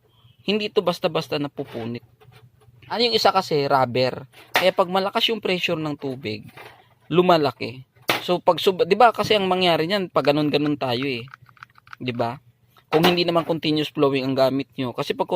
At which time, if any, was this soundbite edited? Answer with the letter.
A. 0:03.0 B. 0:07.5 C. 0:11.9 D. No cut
A